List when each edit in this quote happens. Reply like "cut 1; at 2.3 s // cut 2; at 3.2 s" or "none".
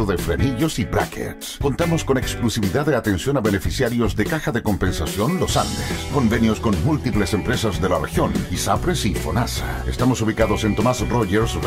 none